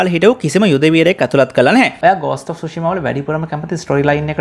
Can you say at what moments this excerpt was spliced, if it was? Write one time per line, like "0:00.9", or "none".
0:01.9